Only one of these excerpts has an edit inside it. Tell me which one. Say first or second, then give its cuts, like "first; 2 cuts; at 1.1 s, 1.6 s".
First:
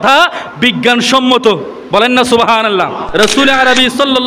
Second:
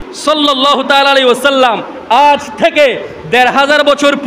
first; 1 cut; at 3.0 s